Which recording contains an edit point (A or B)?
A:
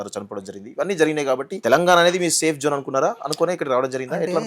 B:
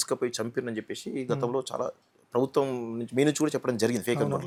A